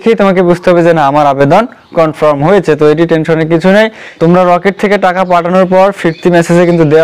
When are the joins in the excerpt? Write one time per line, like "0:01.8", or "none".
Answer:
0:04.0